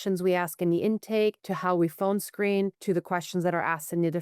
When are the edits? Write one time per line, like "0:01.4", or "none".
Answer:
0:01.5
0:02.8